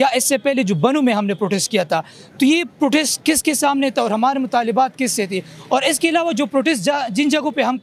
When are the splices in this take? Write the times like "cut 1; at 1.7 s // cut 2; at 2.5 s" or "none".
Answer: none